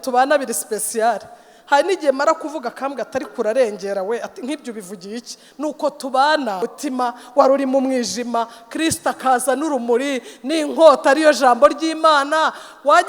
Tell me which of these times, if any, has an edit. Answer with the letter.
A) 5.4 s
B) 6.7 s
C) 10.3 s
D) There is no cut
B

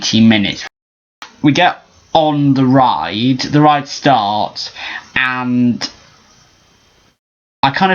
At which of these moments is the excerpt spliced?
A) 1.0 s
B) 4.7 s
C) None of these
A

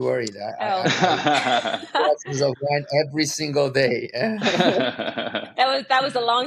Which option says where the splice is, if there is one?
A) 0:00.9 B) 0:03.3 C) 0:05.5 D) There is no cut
D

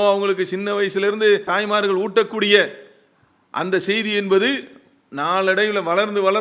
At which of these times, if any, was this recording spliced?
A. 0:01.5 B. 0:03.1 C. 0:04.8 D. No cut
A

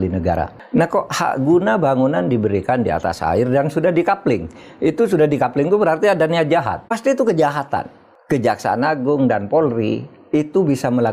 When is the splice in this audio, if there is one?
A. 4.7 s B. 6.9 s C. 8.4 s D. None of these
B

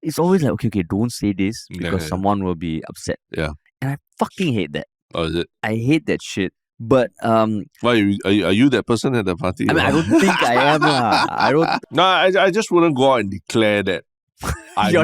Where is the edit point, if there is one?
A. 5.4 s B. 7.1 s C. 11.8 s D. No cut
C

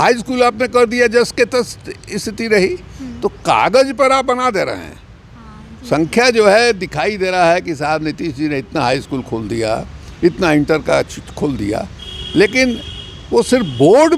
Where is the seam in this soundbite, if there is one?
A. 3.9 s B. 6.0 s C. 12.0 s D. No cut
D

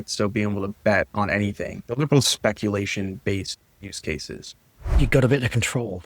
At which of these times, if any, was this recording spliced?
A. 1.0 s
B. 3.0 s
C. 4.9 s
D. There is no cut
C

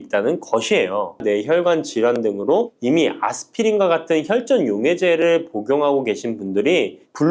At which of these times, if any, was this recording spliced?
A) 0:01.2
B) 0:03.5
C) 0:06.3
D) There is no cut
A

